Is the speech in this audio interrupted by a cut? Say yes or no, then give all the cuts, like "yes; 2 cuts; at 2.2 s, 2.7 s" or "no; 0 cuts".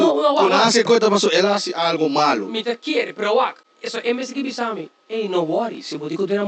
no; 0 cuts